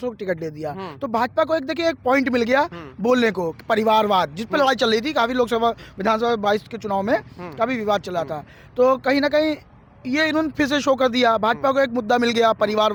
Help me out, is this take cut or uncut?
uncut